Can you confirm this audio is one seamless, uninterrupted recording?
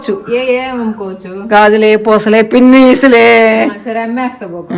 yes; 0 cuts

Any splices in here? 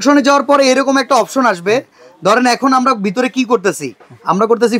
no; 0 cuts

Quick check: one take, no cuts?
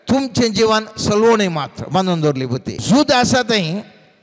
no; 1 cut; at 2.7 s

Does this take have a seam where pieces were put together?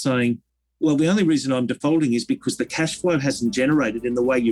no; 0 cuts

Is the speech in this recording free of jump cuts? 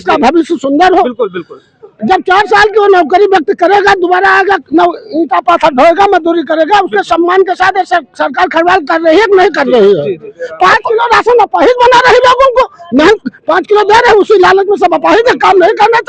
yes; 0 cuts

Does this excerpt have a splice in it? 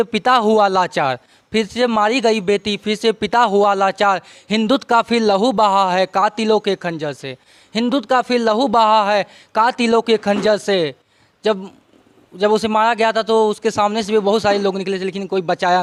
no; 0 cuts

